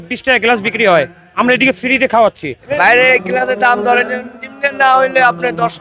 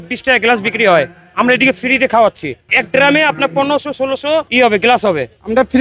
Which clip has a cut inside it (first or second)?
first